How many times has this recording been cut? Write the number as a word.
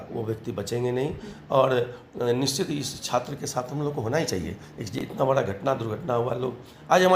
zero